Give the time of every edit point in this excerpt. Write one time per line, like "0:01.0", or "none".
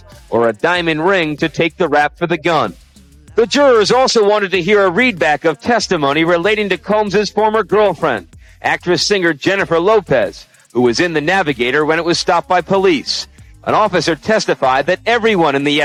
none